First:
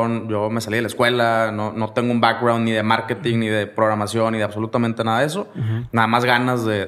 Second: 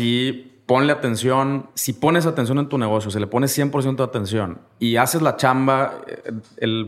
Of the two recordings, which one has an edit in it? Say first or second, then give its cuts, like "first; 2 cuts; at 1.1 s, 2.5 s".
second; 2 cuts; at 1.7 s, 4.6 s